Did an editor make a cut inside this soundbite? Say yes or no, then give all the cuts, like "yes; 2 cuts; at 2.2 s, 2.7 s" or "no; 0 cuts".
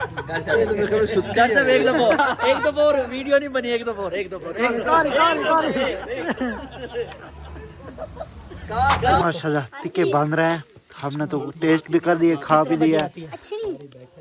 yes; 1 cut; at 9.2 s